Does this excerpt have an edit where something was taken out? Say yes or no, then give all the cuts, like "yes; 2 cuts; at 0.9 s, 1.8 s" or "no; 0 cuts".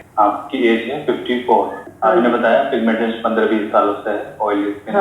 yes; 1 cut; at 1.8 s